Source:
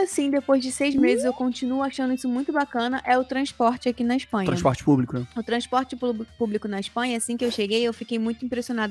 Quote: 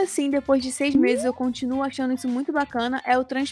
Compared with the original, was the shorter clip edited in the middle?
no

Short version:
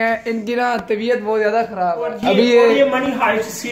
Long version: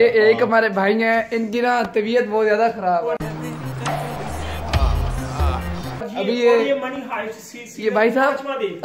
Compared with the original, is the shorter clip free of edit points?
no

